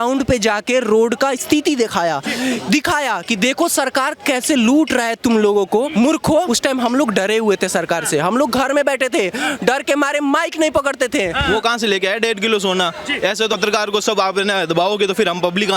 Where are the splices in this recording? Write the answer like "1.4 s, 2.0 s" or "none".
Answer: 6.3 s, 11.5 s, 13.6 s